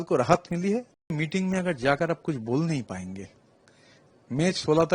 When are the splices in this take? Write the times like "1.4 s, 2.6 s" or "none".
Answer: 1.2 s